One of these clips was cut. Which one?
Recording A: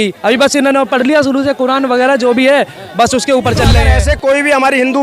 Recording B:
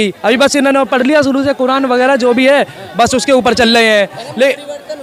A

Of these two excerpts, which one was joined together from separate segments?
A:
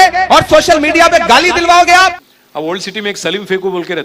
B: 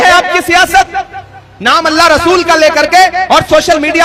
A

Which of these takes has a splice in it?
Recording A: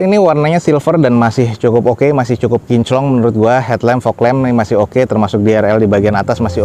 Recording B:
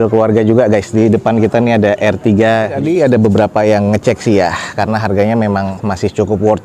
B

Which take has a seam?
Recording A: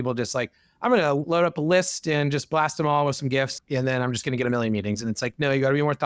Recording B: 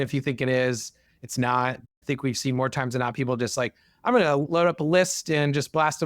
B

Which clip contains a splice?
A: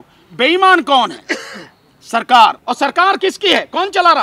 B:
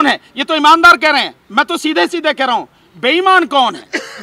A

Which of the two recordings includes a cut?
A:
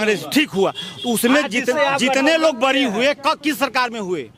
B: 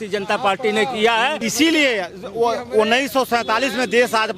B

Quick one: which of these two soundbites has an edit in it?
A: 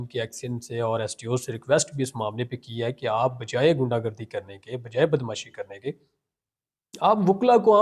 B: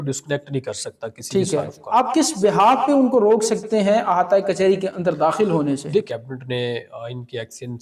B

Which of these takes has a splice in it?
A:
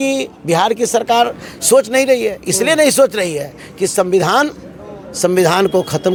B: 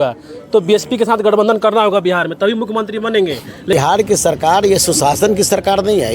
B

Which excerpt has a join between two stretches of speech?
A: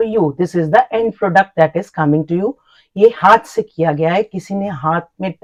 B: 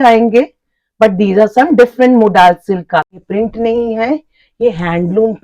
B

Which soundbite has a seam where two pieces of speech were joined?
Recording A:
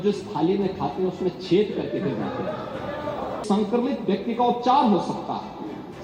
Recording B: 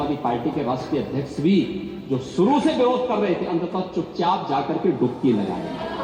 A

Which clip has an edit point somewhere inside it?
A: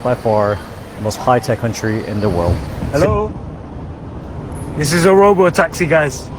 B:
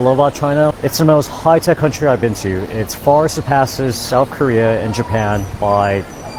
A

